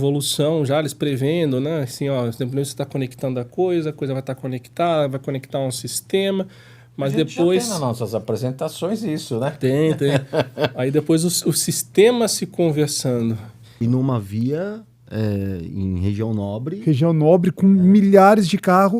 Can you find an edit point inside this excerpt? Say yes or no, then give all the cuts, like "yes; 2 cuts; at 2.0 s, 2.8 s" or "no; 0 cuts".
yes; 1 cut; at 13.7 s